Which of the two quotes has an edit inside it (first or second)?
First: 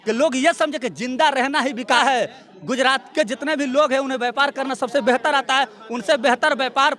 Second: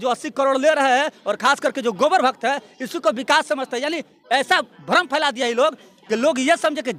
first